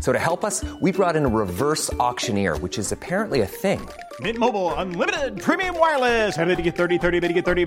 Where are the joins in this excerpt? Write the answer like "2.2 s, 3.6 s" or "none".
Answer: none